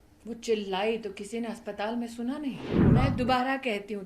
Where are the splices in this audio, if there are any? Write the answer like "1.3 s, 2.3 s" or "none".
2.8 s